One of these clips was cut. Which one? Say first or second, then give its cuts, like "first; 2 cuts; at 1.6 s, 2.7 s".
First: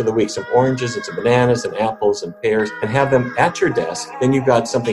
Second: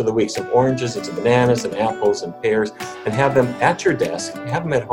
first; 2 cuts; at 2.8 s, 4.0 s